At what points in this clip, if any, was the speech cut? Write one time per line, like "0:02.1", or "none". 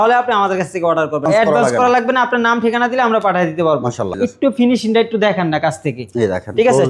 0:01.2
0:04.1